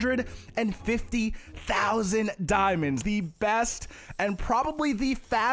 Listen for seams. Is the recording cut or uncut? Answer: cut